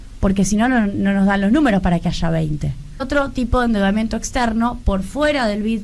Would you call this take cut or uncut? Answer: cut